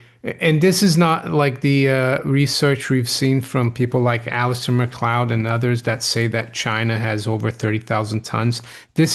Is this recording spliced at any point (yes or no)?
no